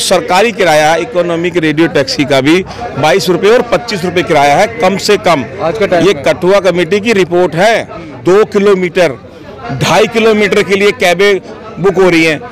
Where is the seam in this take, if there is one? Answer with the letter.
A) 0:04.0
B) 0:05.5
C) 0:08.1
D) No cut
C